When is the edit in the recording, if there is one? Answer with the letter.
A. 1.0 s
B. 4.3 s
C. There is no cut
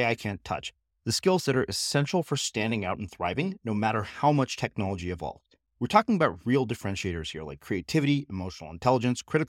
C